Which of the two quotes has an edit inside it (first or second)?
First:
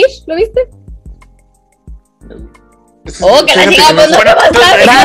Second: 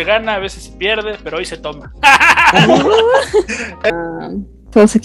second